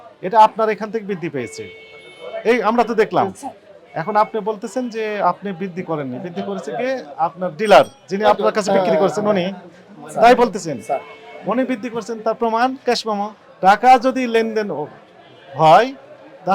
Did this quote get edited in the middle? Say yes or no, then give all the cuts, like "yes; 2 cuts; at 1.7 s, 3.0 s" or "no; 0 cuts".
yes; 1 cut; at 13.4 s